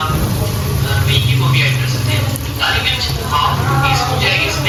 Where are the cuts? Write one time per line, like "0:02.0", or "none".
none

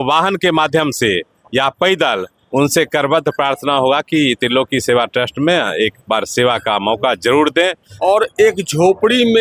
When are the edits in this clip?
0:07.9

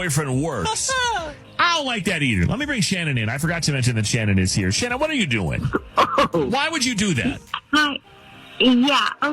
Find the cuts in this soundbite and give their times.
0:01.4

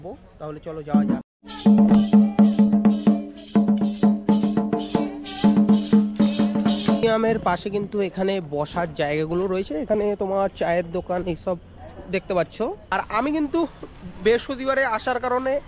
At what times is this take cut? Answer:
0:07.0
0:12.8

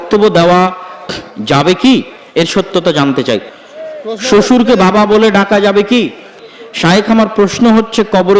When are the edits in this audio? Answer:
0:03.5
0:06.4

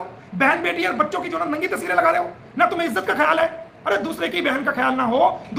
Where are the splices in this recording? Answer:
none

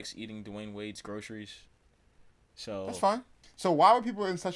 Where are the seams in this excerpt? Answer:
0:03.4

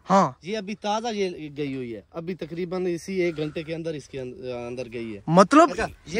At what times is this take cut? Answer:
none

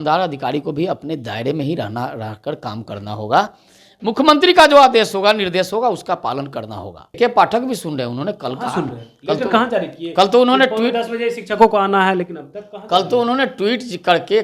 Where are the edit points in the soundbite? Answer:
0:07.0

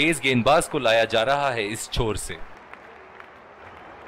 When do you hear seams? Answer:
0:02.4

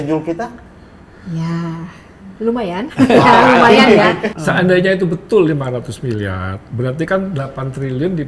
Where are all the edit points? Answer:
0:04.3

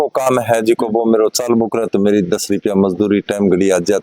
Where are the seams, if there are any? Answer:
none

